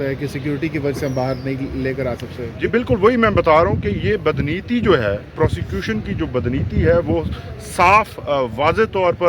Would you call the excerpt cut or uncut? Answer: cut